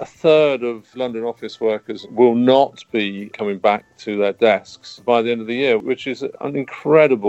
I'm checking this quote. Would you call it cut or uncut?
cut